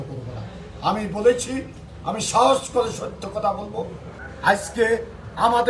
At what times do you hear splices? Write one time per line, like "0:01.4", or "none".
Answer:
0:04.1